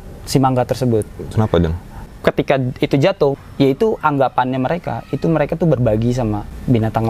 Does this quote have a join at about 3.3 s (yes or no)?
yes